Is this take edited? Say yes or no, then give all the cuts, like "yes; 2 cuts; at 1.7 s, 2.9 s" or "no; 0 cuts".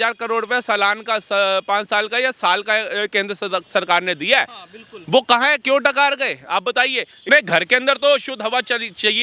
yes; 1 cut; at 7.2 s